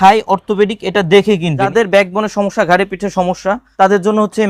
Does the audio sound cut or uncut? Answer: cut